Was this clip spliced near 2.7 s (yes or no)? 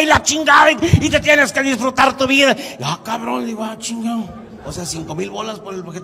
no